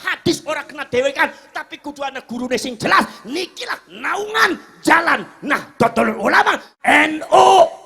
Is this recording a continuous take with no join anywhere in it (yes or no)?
no